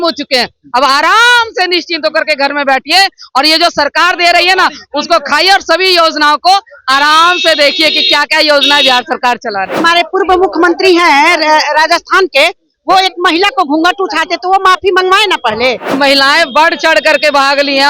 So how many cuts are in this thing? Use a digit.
2